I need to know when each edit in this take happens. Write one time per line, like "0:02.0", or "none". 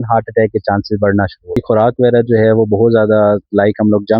0:01.6